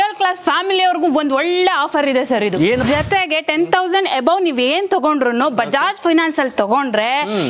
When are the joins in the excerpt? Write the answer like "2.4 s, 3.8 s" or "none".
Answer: 2.8 s